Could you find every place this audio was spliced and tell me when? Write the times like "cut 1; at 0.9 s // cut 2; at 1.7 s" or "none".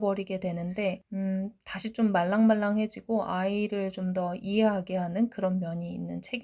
cut 1; at 1.1 s